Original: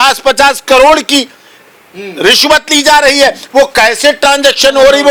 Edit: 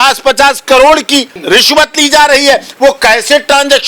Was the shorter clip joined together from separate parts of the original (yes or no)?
yes